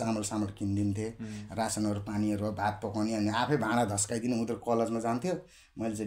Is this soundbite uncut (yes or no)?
yes